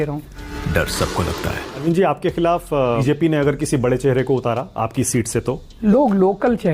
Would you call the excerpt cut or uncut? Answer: cut